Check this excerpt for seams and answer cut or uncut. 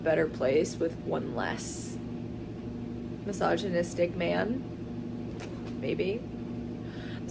uncut